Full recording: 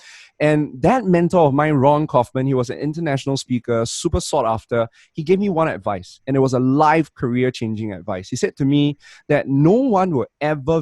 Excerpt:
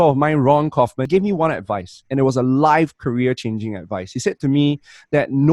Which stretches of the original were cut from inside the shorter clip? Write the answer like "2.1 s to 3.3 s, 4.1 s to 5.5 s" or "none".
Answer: 2.4 s to 5.2 s

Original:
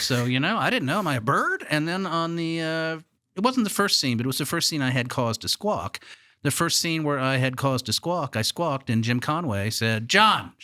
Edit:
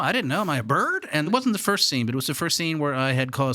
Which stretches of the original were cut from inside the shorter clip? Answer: 1.8 s to 3.4 s, 4.7 s to 6.8 s

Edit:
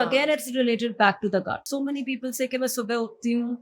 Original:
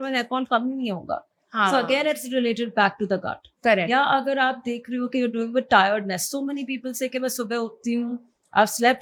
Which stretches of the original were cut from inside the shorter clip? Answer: 3.4 s to 6.3 s

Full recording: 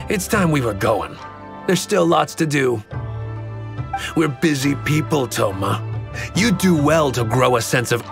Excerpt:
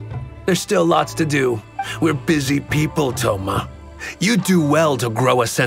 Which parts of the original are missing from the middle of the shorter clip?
3.0 s to 3.9 s

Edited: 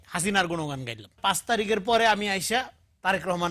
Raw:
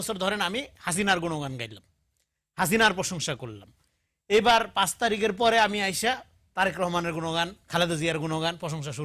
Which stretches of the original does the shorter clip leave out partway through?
1.9 s to 4.7 s

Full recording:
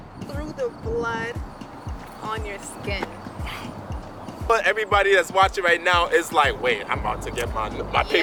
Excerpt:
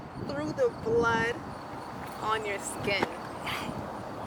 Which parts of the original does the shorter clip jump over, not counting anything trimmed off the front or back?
none

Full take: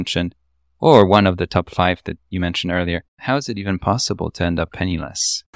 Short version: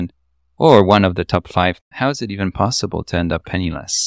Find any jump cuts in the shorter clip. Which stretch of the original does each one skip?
2.1 s to 3.1 s

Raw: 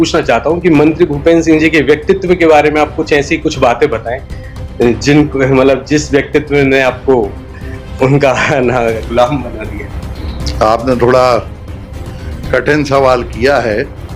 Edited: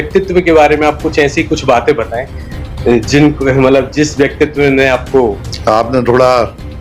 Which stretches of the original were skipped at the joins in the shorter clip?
7.4 s to 10.4 s

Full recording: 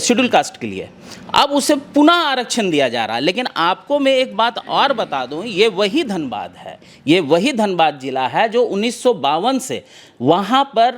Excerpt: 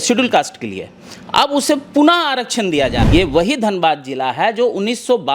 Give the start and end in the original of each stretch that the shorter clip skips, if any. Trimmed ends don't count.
3.0 s to 7.0 s

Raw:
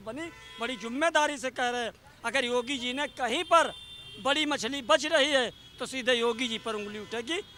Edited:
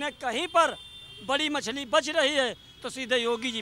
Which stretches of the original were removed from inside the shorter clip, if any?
none

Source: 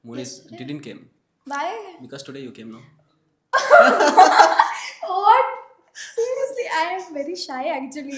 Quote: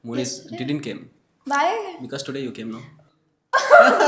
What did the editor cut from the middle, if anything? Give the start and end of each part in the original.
none

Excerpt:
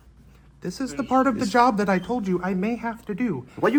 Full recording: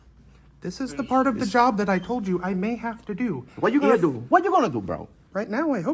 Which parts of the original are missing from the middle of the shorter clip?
none

